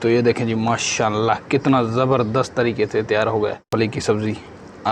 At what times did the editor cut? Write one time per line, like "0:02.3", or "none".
0:03.7